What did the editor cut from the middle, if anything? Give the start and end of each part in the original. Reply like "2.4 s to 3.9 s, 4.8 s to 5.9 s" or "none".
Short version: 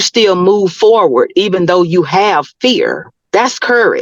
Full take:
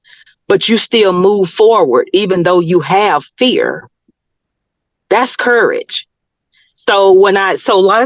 3.9 s to 4.9 s